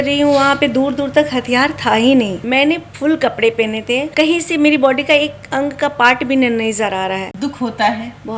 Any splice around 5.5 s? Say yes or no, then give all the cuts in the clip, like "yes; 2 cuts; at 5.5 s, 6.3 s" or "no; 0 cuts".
no; 3 cuts; at 2.4 s, 4.1 s, 7.3 s